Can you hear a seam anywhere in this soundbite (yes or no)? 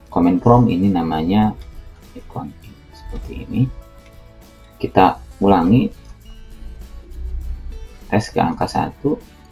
no